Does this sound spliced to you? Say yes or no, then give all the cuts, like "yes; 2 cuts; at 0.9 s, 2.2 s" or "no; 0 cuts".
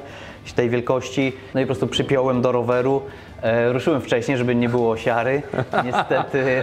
yes; 1 cut; at 1.4 s